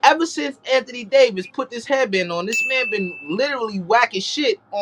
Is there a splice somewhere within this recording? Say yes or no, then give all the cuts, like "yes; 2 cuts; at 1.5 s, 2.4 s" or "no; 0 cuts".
no; 0 cuts